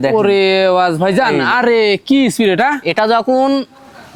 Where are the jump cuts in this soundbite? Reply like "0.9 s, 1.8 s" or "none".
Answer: none